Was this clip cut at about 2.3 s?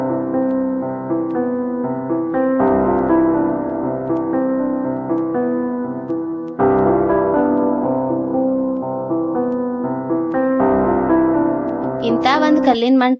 no; 0 cuts

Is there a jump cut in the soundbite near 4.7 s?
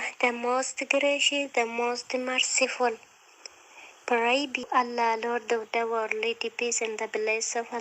yes; 1 cut; at 4.7 s

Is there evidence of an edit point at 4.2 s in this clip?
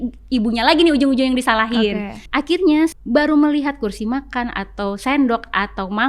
no; 2 cuts; at 2.2 s, 2.9 s

